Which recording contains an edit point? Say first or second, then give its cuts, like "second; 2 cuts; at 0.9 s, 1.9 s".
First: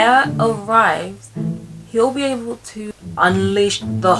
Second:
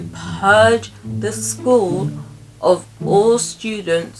first; 1 cut; at 3.0 s